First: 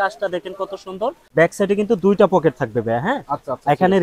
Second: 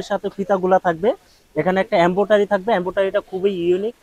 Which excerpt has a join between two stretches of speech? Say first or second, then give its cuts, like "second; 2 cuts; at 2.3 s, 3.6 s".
first; 1 cut; at 1.2 s